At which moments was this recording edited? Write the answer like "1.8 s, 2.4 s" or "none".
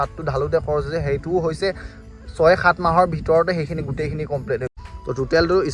4.7 s